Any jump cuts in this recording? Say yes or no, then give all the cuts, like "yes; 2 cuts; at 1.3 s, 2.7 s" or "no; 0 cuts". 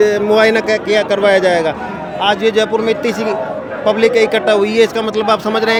no; 0 cuts